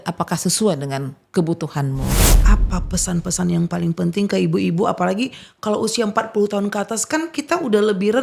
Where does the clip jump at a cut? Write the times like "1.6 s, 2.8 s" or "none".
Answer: 2.3 s